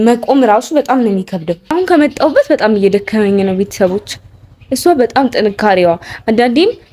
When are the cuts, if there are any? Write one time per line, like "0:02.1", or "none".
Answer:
0:01.7